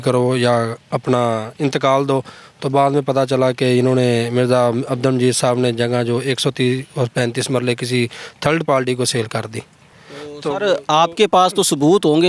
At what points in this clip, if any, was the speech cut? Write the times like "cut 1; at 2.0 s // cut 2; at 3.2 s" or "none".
none